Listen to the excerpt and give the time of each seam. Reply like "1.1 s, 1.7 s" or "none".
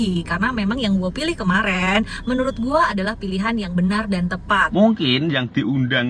4.7 s